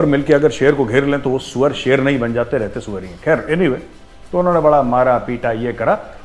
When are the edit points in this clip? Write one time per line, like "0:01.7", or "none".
none